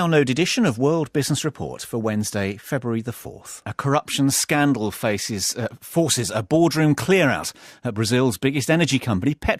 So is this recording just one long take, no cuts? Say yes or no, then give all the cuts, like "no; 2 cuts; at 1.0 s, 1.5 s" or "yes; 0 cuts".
yes; 0 cuts